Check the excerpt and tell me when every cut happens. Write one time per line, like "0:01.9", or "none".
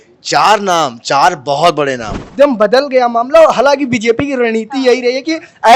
0:02.2